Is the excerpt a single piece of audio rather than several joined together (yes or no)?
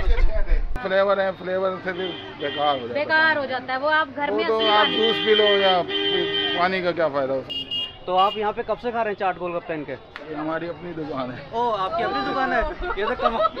no